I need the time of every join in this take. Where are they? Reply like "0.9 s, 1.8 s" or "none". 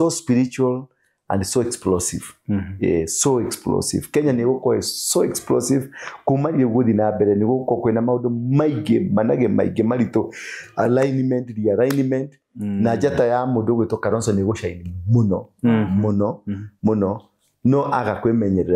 none